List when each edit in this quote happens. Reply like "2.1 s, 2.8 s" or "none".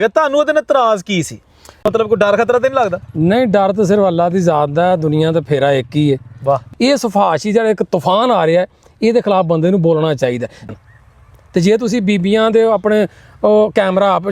1.8 s, 6.7 s, 10.7 s